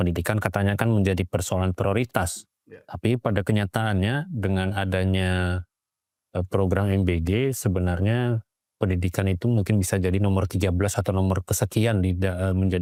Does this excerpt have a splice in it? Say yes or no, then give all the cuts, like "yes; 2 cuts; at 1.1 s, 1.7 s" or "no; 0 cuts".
no; 0 cuts